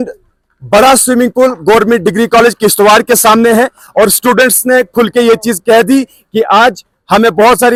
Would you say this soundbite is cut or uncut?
uncut